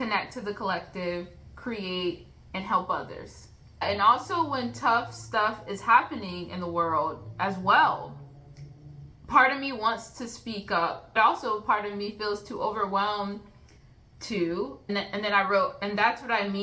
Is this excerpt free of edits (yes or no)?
no